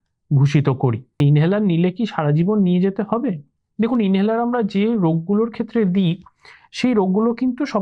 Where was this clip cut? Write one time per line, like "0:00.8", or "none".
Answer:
0:01.2

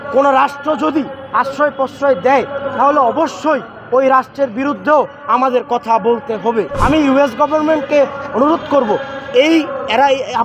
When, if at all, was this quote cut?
0:06.7

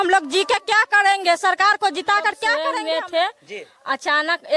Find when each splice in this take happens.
0:02.5

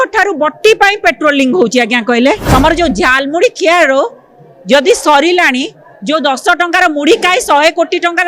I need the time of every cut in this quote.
0:02.4

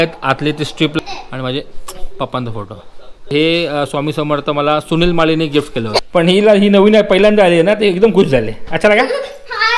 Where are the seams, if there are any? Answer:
0:01.0
0:03.3
0:05.9

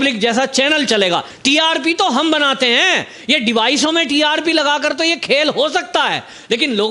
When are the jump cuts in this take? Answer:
0:01.3

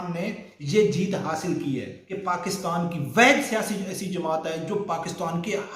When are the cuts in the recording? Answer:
0:02.0

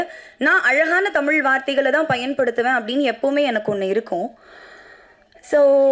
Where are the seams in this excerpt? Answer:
none

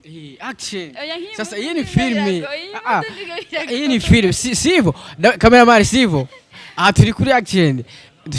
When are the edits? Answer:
none

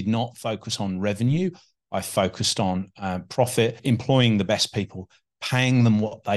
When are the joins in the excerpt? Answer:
0:03.8

